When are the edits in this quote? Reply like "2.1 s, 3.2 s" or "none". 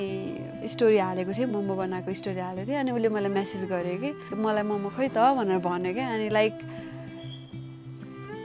1.5 s